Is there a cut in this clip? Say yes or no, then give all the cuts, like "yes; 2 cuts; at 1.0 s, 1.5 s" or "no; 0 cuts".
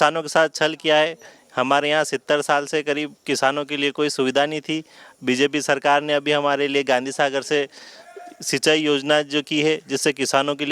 no; 0 cuts